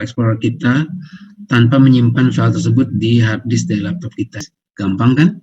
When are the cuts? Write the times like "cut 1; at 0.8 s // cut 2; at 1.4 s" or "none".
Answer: cut 1; at 4.5 s